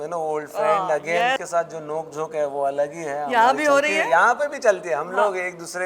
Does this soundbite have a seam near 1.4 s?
yes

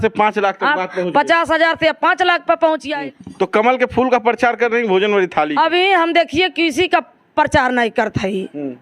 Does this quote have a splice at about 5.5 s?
no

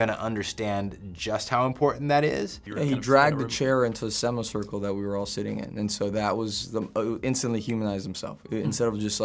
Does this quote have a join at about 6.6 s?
no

